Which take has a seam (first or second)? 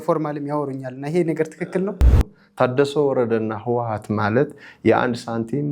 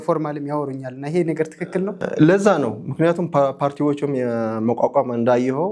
first